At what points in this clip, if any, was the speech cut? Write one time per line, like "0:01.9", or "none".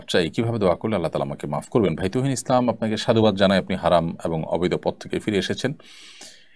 none